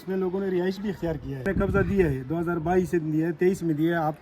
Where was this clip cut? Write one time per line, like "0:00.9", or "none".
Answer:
0:01.4